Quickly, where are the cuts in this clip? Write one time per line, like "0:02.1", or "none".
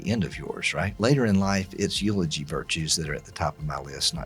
0:00.9

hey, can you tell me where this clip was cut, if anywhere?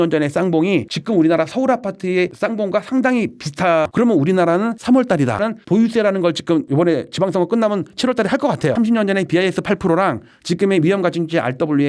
0:03.9
0:05.4
0:08.7

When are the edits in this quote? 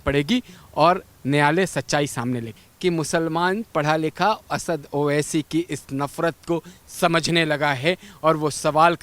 0:02.6

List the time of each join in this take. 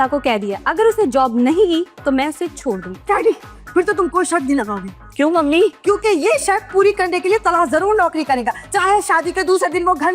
none

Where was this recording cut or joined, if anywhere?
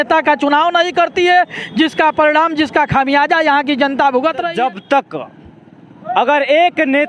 0:04.5

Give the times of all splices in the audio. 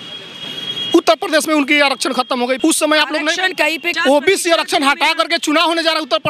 0:02.6
0:03.9

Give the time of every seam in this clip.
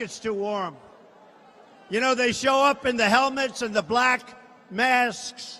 0:02.3

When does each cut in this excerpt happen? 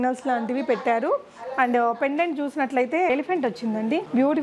none

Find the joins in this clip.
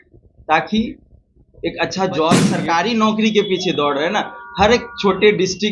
0:02.5

